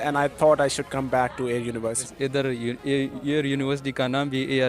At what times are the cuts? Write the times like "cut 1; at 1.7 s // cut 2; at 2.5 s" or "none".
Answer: cut 1; at 2.1 s

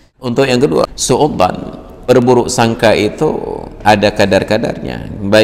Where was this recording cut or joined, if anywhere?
cut 1; at 1.0 s // cut 2; at 2.1 s

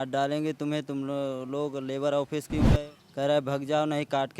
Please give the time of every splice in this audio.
cut 1; at 2.7 s

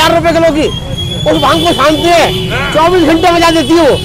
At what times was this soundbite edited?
none

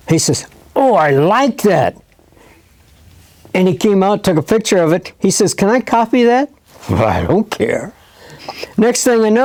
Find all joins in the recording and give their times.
none

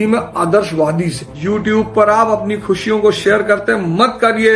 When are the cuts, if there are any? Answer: cut 1; at 1.3 s

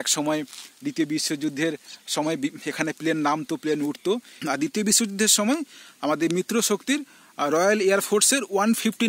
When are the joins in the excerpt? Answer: cut 1; at 4.3 s

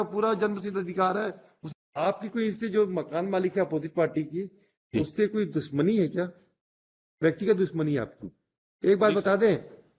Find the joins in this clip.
cut 1; at 1.5 s

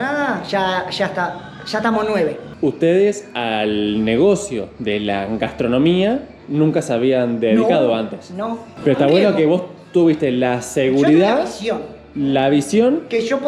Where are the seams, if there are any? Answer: cut 1; at 2.5 s // cut 2; at 8.6 s

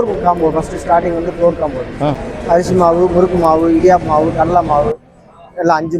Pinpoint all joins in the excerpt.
cut 1; at 2.2 s

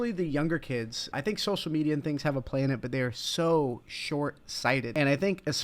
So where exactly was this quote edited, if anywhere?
cut 1; at 1.1 s // cut 2; at 4.9 s

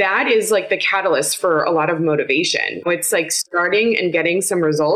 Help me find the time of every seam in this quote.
cut 1; at 2.9 s

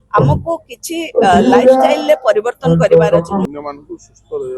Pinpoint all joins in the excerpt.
cut 1; at 3.4 s

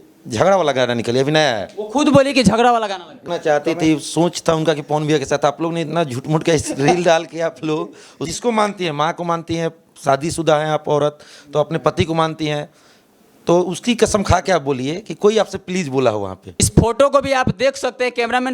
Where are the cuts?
cut 1; at 3.2 s // cut 2; at 8.3 s // cut 3; at 16.7 s

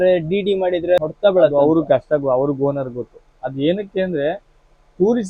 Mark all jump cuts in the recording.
cut 1; at 1.0 s

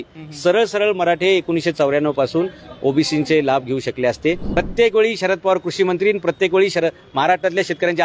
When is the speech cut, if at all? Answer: cut 1; at 4.4 s

